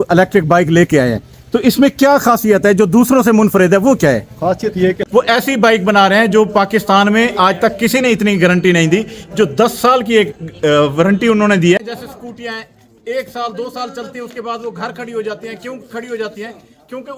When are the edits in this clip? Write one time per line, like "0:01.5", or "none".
0:05.0
0:11.9